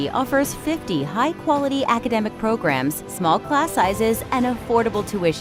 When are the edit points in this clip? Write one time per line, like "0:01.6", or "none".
none

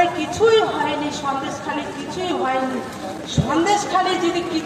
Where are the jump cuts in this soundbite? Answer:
none

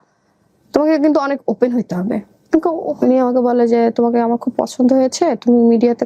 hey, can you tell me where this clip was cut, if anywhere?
0:02.5

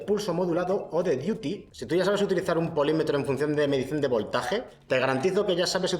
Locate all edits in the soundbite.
0:01.7
0:04.7

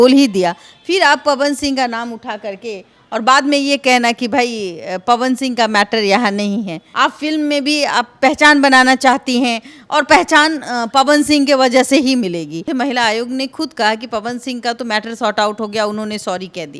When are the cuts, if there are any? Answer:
0:06.8
0:12.7

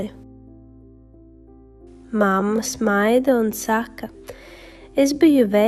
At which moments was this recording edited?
none

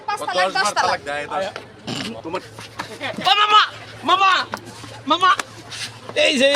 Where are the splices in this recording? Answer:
0:02.2

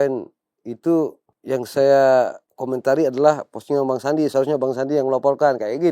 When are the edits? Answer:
0:01.3

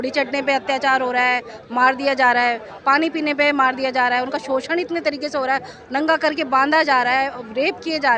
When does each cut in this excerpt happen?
none

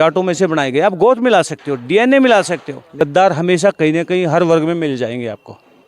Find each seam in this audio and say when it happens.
0:03.0

